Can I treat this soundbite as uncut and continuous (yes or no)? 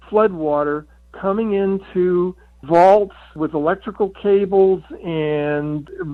yes